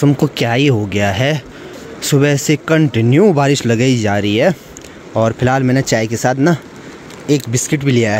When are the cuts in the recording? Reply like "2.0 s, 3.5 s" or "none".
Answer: none